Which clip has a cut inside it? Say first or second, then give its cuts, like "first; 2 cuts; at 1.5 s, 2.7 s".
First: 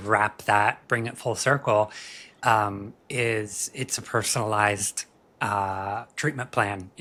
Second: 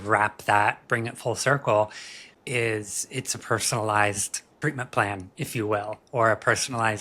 second; 2 cuts; at 2.2 s, 4.5 s